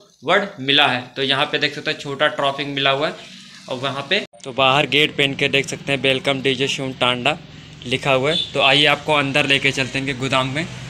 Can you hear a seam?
yes; 1 cut; at 4.3 s

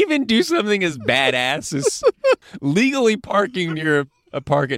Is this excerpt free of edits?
no; 1 cut; at 2.5 s

